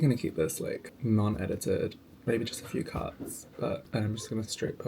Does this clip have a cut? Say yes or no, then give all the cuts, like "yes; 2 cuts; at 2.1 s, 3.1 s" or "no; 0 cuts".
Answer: yes; 2 cuts; at 0.9 s, 3.8 s